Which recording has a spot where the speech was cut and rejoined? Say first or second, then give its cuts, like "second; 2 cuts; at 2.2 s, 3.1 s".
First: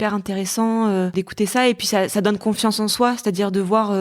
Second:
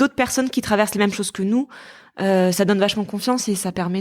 first; 1 cut; at 1.1 s